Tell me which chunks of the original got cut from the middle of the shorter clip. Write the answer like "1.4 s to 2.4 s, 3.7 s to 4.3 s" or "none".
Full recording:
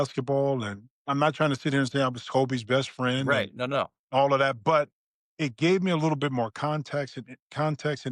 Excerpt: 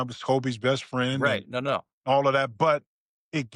none

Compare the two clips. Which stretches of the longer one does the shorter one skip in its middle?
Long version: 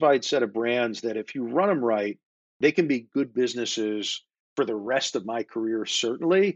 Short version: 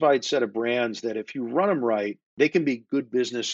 2.2 s to 2.4 s

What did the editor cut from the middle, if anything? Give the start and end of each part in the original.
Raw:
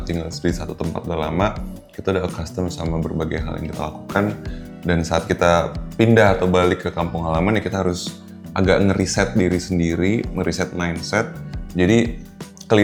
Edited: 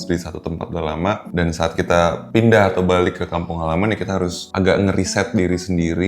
1.6 s to 4.8 s, 5.7 s to 5.9 s, 8.1 s to 8.4 s

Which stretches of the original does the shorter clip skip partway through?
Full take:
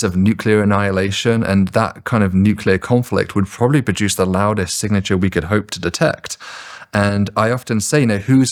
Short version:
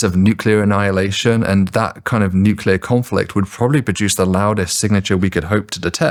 none

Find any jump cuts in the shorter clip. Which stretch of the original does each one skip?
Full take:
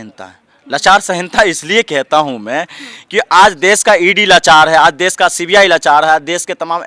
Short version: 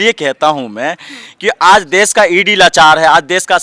none

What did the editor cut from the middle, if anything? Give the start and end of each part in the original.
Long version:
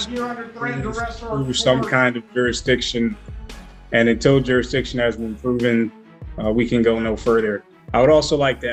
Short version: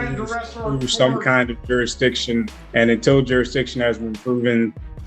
3.2 s to 3.8 s

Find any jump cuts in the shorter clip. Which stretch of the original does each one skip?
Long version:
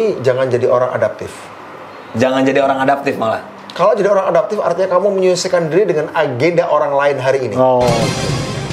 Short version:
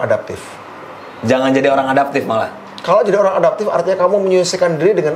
none

